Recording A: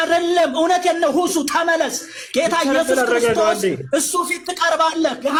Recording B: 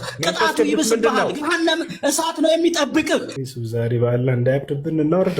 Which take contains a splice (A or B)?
B